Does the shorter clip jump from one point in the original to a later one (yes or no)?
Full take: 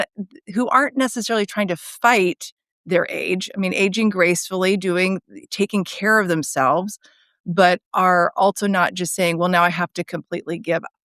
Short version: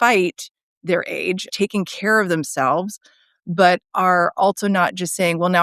yes